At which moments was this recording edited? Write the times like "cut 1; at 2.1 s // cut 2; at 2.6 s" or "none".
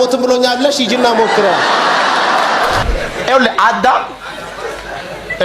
cut 1; at 2.8 s